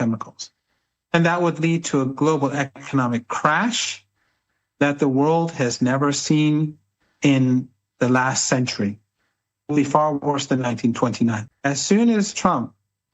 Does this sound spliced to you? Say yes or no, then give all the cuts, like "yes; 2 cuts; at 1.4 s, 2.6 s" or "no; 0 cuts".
yes; 1 cut; at 11.4 s